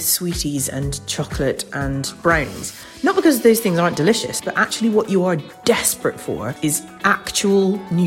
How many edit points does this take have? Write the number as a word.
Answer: two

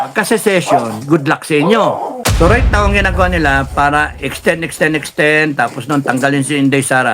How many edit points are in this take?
one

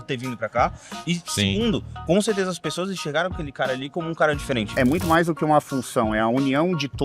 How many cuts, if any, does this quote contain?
one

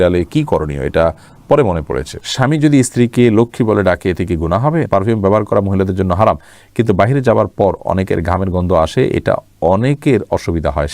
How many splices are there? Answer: two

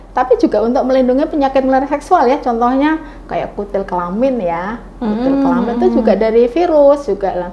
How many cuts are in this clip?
zero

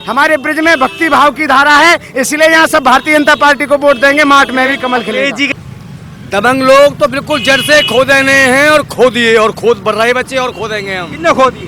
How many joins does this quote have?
one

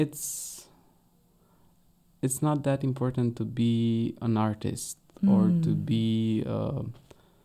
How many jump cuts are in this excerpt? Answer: zero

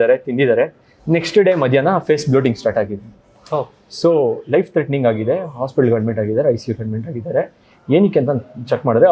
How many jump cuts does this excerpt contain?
zero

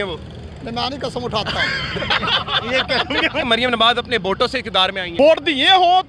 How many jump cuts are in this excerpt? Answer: two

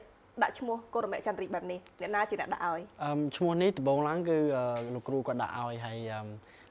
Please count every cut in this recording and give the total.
zero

